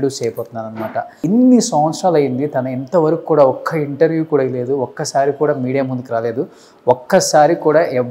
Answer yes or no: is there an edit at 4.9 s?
no